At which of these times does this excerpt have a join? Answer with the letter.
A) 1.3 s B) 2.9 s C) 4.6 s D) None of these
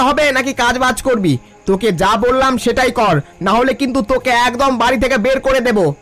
D